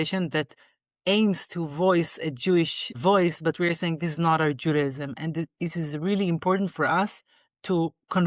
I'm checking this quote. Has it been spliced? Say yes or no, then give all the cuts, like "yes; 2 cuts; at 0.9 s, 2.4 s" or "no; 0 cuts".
no; 0 cuts